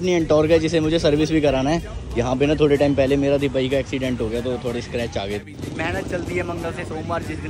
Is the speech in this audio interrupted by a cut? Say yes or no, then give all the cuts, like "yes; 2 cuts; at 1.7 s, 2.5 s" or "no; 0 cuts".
yes; 1 cut; at 5.6 s